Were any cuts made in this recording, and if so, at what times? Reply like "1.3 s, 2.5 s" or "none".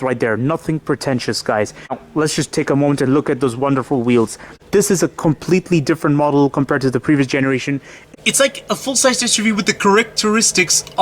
1.9 s, 4.5 s, 7.9 s